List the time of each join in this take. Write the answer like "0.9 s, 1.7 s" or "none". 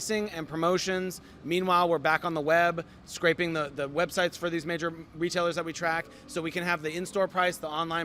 none